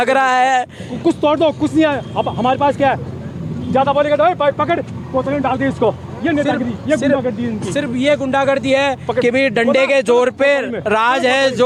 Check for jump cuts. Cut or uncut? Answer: uncut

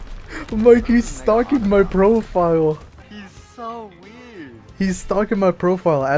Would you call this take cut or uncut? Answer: cut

